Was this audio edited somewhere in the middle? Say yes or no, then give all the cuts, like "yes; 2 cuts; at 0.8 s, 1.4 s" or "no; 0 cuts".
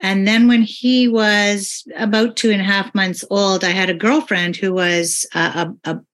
no; 0 cuts